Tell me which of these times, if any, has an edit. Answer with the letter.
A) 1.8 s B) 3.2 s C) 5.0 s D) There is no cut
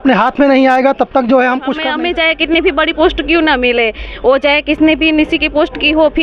A